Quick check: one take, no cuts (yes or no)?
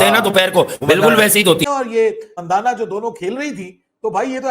no